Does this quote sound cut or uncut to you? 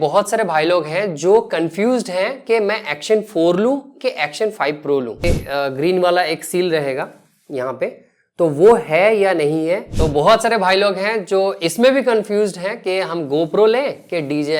cut